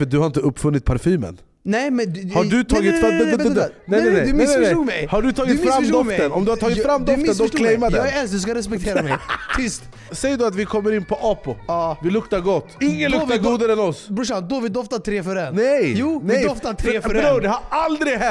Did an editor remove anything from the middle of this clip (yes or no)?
yes